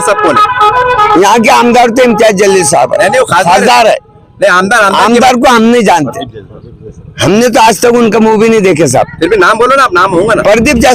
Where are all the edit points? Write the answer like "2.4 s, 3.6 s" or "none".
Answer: none